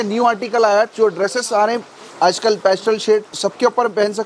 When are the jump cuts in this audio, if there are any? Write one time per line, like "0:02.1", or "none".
0:00.9
0:03.4

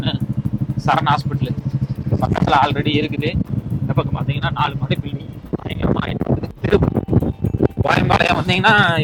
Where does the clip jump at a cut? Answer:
none

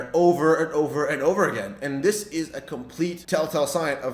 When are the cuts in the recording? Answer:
0:03.2

